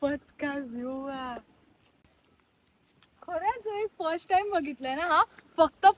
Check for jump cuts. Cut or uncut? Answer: uncut